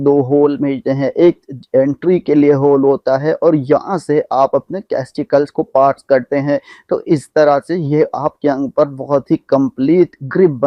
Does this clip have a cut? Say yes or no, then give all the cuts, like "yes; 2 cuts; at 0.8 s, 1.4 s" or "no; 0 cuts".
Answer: no; 0 cuts